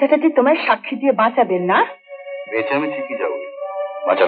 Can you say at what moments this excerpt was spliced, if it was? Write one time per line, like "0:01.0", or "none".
none